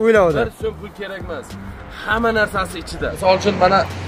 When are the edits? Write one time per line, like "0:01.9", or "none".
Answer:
0:03.1